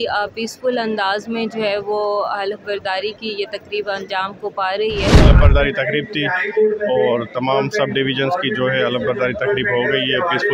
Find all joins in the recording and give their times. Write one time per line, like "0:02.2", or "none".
0:05.2